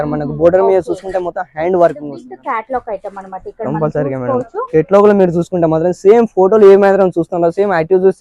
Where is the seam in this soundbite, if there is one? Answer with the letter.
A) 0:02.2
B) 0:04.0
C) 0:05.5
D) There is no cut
A